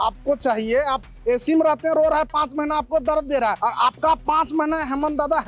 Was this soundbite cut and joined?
yes; 1 cut; at 3.6 s

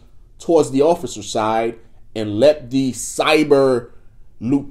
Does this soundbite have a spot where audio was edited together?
no; 0 cuts

